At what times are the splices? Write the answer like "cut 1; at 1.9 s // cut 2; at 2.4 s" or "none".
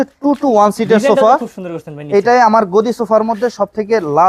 none